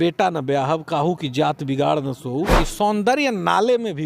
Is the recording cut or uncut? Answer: cut